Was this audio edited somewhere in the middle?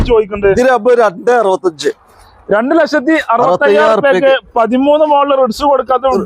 no; 0 cuts

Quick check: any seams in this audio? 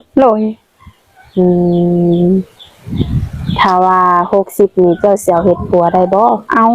no; 0 cuts

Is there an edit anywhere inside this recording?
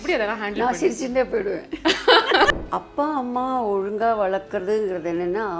yes; 1 cut; at 2.5 s

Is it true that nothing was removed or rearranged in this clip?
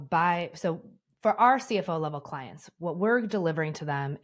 yes; 0 cuts

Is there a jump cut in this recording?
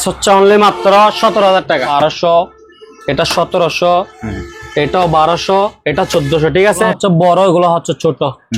yes; 2 cuts; at 1.9 s, 6.9 s

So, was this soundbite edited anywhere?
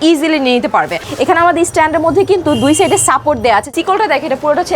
yes; 2 cuts; at 1.0 s, 3.7 s

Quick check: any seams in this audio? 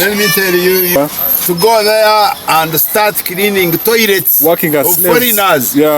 yes; 1 cut; at 1.0 s

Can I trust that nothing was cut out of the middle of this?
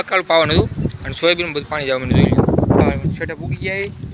no; 1 cut; at 2.8 s

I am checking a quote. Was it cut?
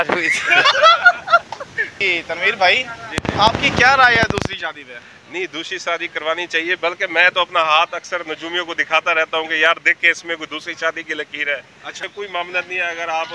yes; 2 cuts; at 2.0 s, 12.0 s

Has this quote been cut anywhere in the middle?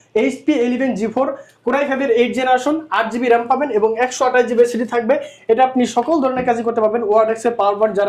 no; 0 cuts

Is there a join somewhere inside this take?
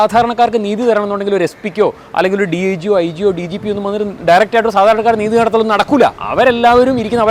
no; 0 cuts

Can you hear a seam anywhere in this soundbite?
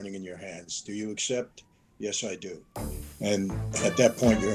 no; 0 cuts

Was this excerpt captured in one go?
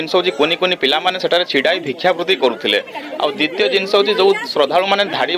yes; 0 cuts

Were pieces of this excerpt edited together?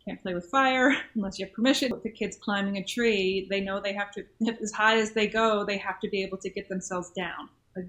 yes; 1 cut; at 1.9 s

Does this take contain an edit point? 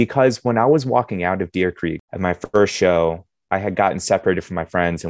yes; 1 cut; at 2.1 s

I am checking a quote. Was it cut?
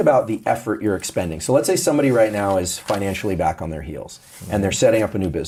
no; 0 cuts

